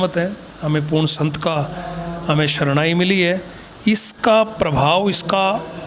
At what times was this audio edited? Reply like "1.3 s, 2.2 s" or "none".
none

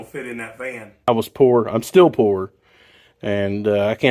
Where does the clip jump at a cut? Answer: 1.1 s

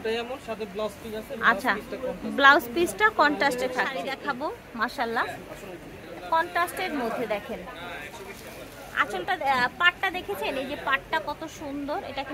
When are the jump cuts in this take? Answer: 4.0 s

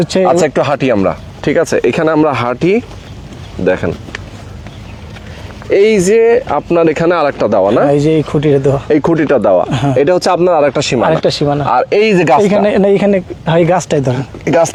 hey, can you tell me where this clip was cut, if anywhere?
none

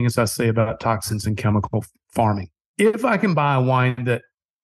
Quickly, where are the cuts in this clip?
2.6 s

